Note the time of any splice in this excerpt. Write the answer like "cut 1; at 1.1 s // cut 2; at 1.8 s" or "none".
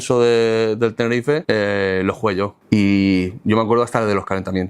cut 1; at 1.4 s // cut 2; at 2.6 s